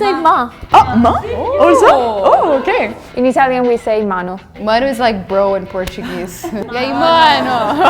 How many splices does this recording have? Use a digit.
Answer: 2